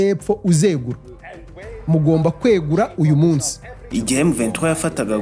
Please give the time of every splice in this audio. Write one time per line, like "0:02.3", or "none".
0:03.8